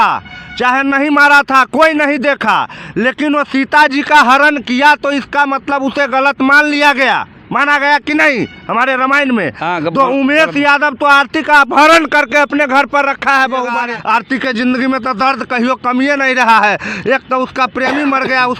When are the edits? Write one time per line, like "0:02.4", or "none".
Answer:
0:13.9